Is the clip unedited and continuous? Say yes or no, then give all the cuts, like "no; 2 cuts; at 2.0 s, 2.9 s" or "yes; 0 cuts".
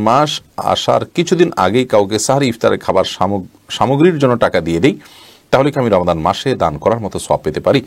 yes; 0 cuts